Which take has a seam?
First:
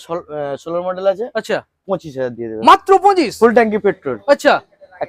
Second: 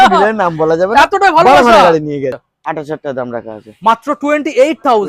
second; 1 cut; at 2.3 s

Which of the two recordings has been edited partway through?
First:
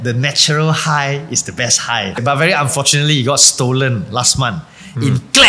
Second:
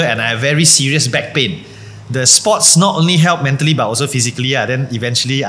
first; 1 cut; at 2.2 s

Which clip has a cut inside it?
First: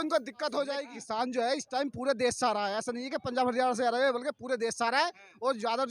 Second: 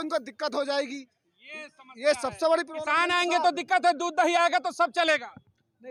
first; 1 cut; at 0.9 s

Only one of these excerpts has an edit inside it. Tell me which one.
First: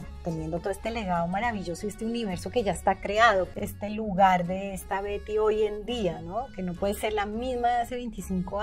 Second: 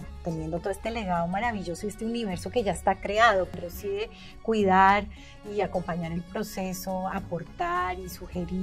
first; 1 cut; at 3.5 s

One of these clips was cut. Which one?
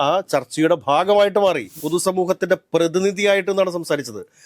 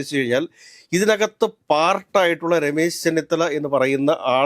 first; 1 cut; at 1.7 s

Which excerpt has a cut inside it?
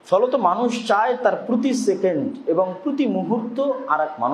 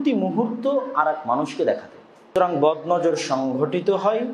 second; 1 cut; at 2.3 s

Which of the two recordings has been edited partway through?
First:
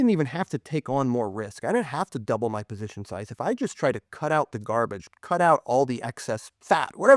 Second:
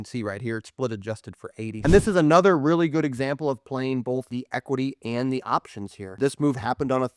second; 3 cuts; at 1.8 s, 4.3 s, 6.1 s

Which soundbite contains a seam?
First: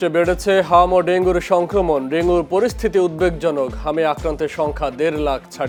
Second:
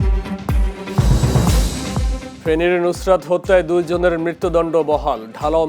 second; 1 cut; at 2.2 s

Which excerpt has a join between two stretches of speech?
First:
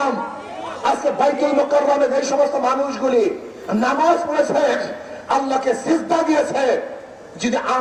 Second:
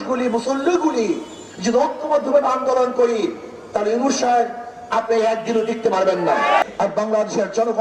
second; 1 cut; at 6.6 s

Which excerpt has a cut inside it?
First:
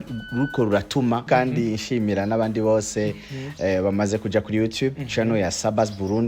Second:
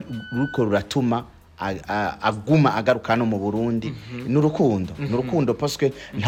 first; 1 cut; at 1.2 s

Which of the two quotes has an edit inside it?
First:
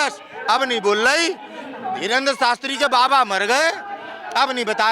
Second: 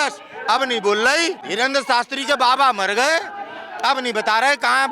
second; 1 cut; at 1.5 s

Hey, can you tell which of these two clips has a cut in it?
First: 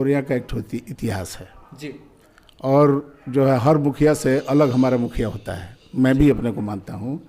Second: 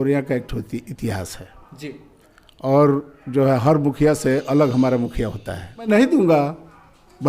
second; 1 cut; at 5.9 s

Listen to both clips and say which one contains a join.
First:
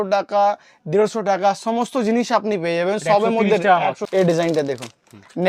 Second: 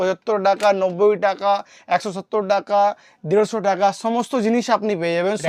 first; 1 cut; at 4.0 s

